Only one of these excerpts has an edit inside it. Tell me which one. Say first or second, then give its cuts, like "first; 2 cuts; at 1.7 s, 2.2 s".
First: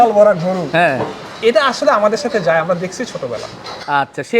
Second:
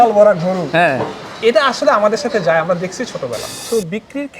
second; 1 cut; at 3.5 s